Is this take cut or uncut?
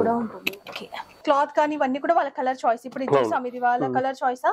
cut